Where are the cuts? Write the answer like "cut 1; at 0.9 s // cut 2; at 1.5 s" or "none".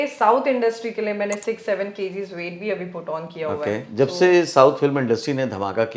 cut 1; at 3.9 s